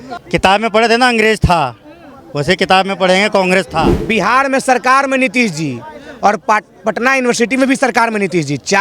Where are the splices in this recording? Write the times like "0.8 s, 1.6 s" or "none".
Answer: 4.0 s